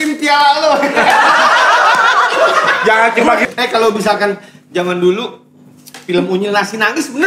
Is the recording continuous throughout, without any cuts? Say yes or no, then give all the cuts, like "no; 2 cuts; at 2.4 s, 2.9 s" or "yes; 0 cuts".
no; 1 cut; at 3.4 s